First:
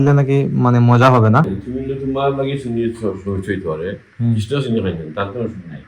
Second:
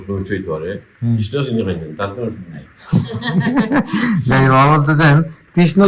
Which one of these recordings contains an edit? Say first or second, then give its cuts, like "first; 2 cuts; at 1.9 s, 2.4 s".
first; 1 cut; at 1.6 s